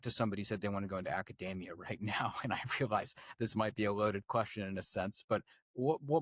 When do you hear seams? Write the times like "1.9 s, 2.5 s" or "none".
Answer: none